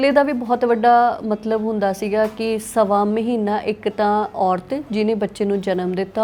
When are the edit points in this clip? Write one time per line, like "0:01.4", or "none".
none